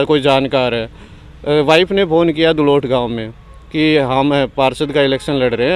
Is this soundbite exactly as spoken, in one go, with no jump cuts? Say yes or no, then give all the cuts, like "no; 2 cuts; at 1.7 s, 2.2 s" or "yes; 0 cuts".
yes; 0 cuts